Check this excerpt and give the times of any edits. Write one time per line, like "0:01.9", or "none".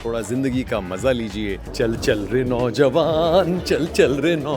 0:01.6